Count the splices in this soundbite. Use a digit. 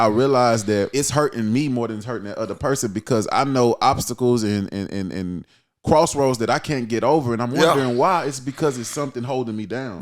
1